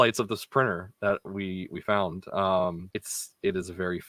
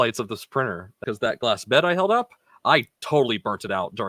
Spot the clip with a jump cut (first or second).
second